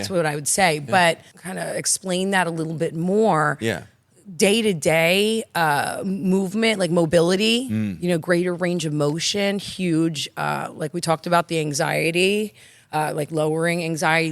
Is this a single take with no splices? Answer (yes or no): no